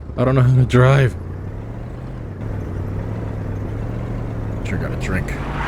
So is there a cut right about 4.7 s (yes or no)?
no